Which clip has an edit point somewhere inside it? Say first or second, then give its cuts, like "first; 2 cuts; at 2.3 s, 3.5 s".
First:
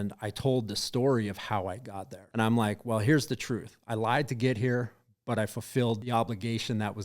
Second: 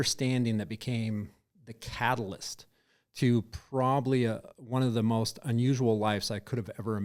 first; 2 cuts; at 2.2 s, 6.0 s